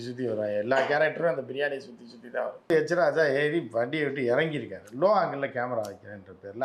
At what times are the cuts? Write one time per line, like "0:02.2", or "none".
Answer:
0:02.7